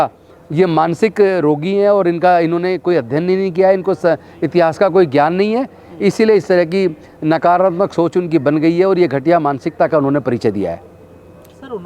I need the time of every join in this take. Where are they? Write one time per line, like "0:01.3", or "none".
none